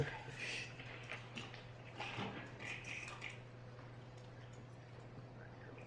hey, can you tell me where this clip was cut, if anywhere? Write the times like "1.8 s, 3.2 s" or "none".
3.2 s